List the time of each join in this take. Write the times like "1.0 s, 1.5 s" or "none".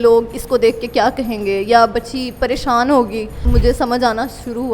3.4 s